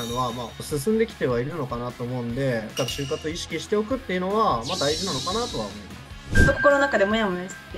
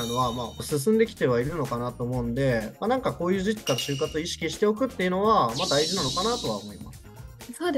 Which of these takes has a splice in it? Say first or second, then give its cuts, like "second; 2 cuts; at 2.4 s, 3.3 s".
first; 2 cuts; at 2.7 s, 6.3 s